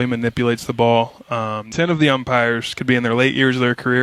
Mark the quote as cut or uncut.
cut